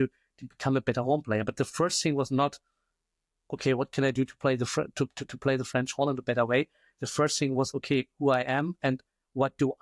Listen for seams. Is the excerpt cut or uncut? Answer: uncut